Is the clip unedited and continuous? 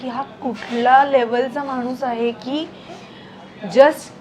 yes; 0 cuts

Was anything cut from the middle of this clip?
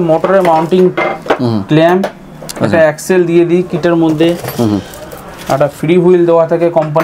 no; 0 cuts

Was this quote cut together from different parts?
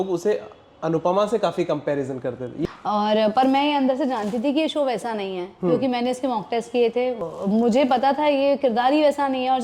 yes; 2 cuts; at 2.6 s, 7.3 s

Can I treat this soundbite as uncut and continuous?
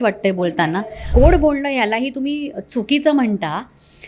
no; 1 cut; at 1.1 s

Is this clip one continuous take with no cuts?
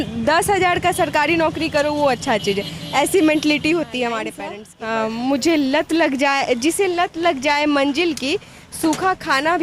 no; 1 cut; at 4.4 s

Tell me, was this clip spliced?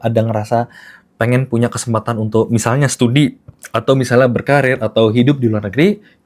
no; 0 cuts

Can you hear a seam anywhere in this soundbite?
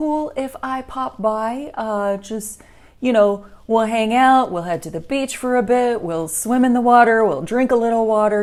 no; 0 cuts

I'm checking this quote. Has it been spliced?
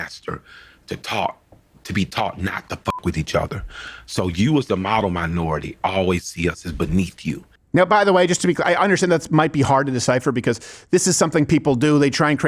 no; 0 cuts

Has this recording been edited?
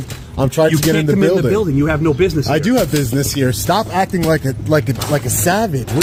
no; 0 cuts

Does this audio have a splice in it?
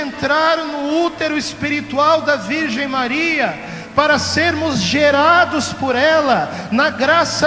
no; 0 cuts

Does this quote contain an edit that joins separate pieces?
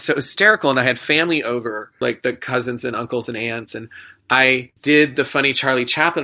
yes; 2 cuts; at 2.0 s, 4.7 s

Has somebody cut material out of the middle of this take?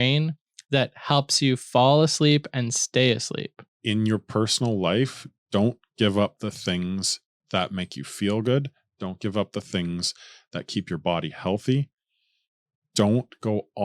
yes; 1 cut; at 3.7 s

